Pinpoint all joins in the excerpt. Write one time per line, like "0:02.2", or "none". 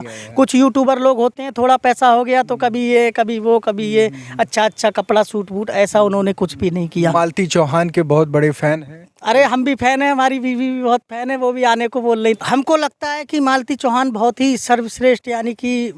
0:07.1
0:12.4